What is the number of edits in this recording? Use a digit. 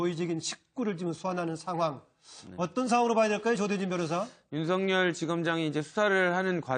1